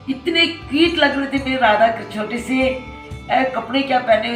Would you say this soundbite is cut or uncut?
uncut